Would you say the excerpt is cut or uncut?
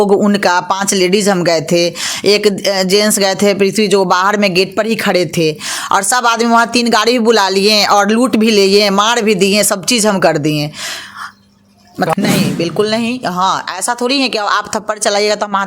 cut